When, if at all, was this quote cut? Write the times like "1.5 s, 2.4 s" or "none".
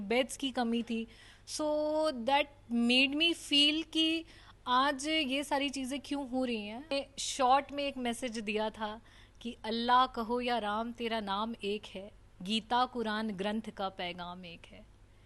6.9 s